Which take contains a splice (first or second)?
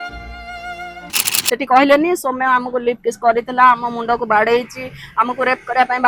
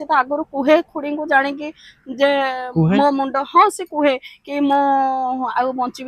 first